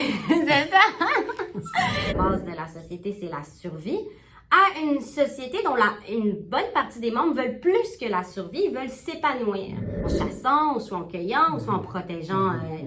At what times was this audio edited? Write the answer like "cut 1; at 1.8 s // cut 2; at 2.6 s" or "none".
cut 1; at 2.1 s // cut 2; at 10.1 s

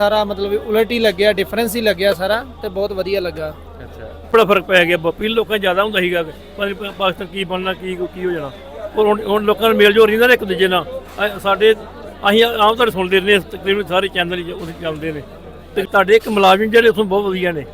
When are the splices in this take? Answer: cut 1; at 4.3 s // cut 2; at 15.9 s

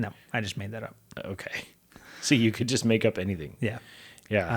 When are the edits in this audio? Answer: none

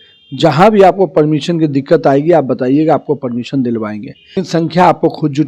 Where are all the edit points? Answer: cut 1; at 4.4 s

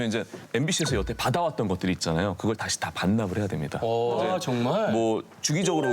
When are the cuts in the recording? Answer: cut 1; at 4.2 s

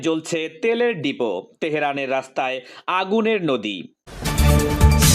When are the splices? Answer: cut 1; at 4.1 s

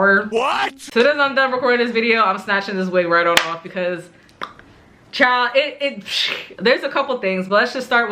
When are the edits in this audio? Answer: cut 1; at 0.9 s // cut 2; at 6.4 s

